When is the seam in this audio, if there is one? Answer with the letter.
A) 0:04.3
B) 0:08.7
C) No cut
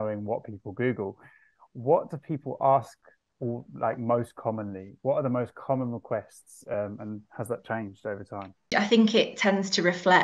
B